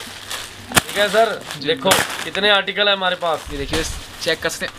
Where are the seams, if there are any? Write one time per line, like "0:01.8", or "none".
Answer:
0:03.5